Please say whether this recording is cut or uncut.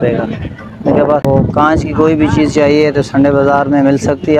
cut